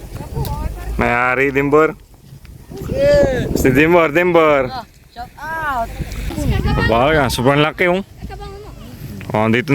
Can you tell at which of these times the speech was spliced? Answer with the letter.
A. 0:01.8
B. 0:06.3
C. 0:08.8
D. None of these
B